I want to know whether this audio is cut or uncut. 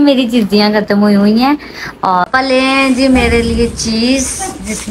cut